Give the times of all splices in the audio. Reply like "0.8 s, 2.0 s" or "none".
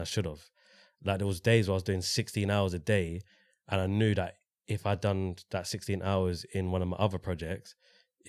none